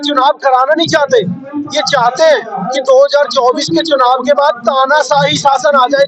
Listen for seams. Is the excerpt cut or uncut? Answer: uncut